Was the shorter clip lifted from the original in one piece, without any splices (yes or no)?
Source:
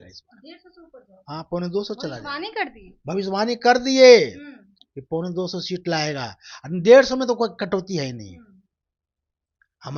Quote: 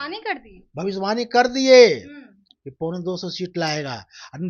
yes